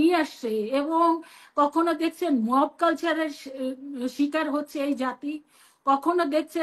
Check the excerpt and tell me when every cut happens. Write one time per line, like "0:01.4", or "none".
none